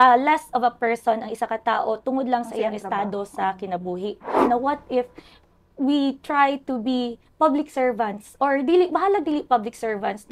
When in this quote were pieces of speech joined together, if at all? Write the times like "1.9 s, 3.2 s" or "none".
4.5 s